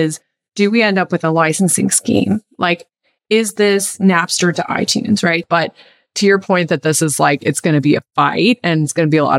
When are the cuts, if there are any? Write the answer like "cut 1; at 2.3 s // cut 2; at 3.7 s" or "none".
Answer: cut 1; at 5.4 s